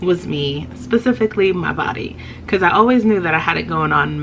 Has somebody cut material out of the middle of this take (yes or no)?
no